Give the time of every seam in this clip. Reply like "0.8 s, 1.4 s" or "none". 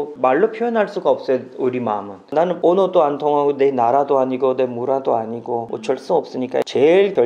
none